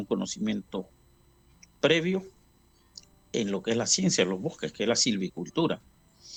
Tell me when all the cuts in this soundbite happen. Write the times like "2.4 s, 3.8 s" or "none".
none